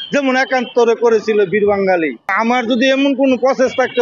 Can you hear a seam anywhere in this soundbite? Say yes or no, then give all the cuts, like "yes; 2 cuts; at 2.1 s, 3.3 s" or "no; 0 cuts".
yes; 1 cut; at 2.4 s